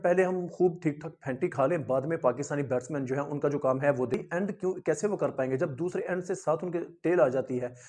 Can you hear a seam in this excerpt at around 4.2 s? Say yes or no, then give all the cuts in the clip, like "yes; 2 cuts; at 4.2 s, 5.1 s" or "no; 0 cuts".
yes; 1 cut; at 4.2 s